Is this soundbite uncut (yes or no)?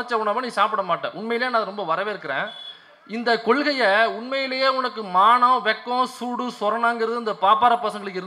yes